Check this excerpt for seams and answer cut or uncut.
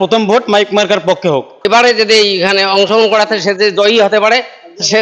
cut